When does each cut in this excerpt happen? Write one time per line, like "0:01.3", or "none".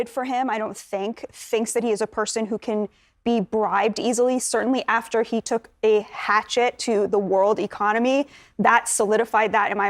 none